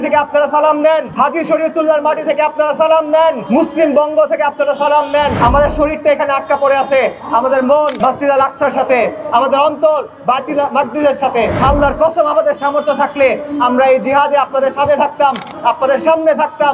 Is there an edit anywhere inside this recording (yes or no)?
yes